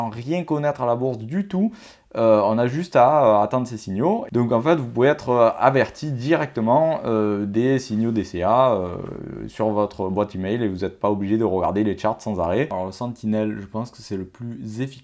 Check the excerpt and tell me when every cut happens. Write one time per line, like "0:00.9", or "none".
0:04.2
0:12.7